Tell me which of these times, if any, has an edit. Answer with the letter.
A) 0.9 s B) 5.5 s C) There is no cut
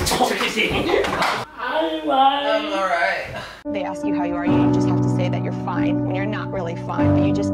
C